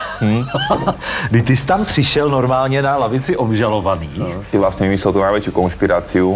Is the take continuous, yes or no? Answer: no